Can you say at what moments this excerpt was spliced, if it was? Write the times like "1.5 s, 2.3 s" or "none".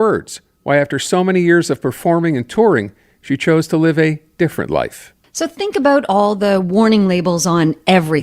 5.0 s